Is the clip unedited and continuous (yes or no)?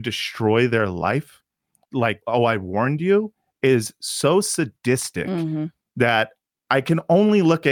no